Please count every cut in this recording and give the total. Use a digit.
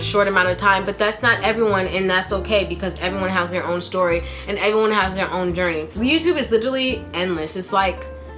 1